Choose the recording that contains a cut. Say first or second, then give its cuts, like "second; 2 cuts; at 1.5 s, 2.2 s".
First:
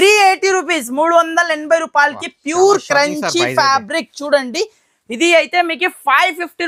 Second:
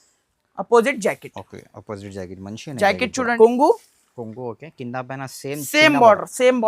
second; 1 cut; at 3.3 s